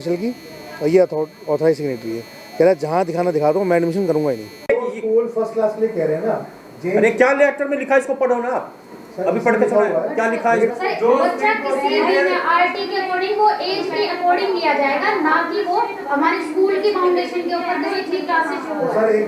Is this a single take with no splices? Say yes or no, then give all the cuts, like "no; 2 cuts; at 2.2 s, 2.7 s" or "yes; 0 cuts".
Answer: no; 2 cuts; at 4.5 s, 10.7 s